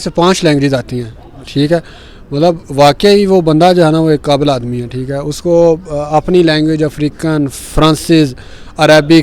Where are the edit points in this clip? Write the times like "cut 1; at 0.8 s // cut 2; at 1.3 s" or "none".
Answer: none